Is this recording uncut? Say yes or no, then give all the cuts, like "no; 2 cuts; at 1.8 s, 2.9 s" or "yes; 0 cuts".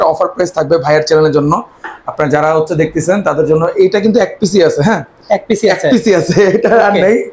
yes; 0 cuts